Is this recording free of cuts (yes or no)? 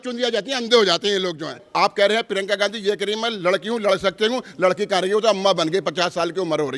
no